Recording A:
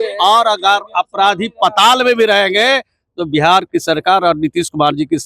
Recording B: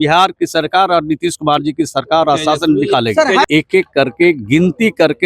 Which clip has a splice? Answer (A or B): B